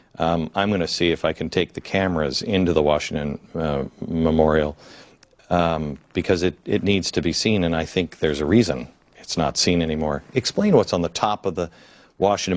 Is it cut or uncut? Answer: cut